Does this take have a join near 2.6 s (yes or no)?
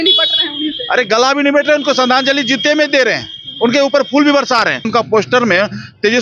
no